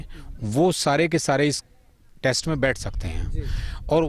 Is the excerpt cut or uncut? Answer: uncut